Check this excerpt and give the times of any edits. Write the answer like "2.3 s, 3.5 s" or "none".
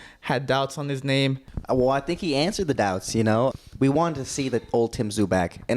1.5 s, 3.5 s